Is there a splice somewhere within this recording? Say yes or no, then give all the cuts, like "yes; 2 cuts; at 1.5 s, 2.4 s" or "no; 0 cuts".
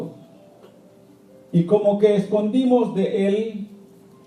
yes; 1 cut; at 3.0 s